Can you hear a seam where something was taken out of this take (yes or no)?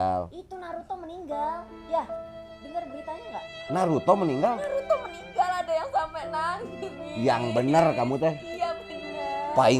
no